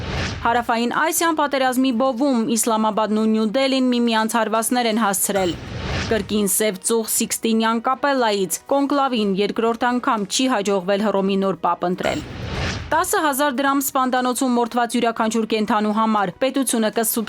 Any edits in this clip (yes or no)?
yes